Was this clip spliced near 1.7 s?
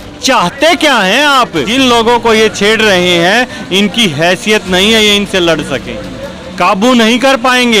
yes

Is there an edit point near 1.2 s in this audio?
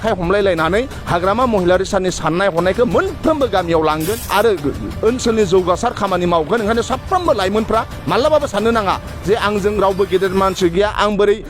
no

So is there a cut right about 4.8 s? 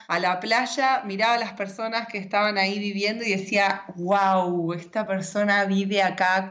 no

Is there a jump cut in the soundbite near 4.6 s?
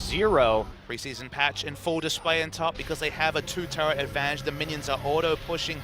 yes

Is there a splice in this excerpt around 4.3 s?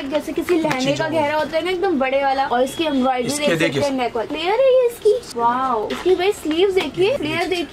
no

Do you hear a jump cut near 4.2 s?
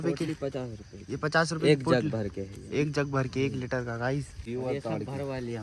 no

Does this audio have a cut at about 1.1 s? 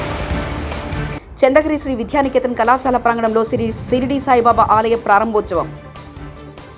yes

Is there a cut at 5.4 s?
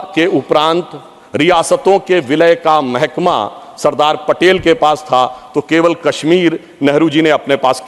no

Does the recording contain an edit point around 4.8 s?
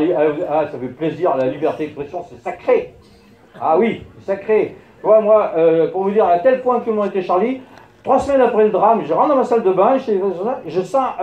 no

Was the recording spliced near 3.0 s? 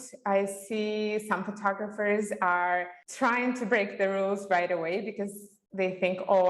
yes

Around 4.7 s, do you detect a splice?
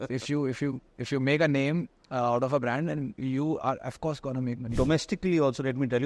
yes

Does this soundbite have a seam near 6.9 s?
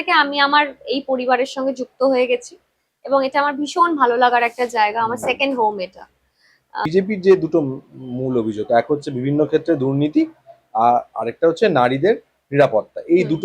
yes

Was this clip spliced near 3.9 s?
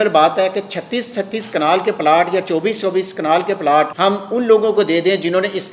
yes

